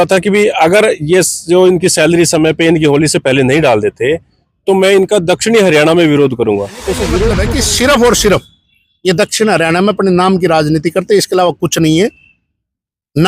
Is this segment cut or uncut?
cut